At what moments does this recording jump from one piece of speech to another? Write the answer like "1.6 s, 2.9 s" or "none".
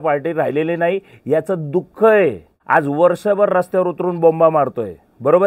2.5 s